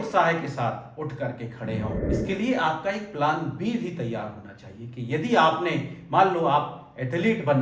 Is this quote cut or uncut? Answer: uncut